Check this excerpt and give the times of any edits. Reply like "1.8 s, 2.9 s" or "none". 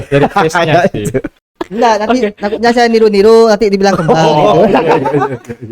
1.4 s